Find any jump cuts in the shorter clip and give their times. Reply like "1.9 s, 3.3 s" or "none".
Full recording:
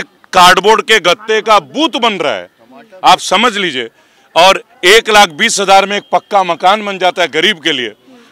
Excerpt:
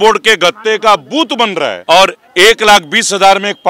1.8 s